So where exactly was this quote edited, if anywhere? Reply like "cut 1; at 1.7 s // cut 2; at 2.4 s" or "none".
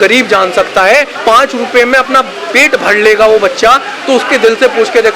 cut 1; at 1.1 s